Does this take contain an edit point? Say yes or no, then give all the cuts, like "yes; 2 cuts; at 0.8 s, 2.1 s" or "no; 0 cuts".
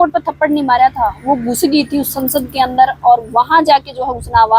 no; 0 cuts